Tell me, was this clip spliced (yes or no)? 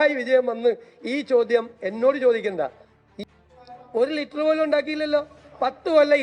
yes